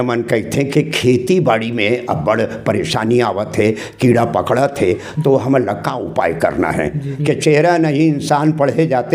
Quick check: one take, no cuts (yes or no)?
no